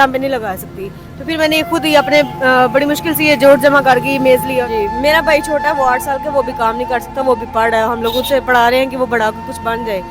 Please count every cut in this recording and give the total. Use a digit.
1